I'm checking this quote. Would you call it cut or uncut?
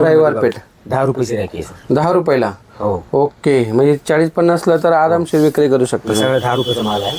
uncut